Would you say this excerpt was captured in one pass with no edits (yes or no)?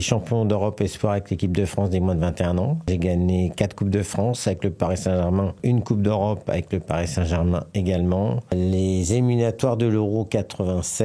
no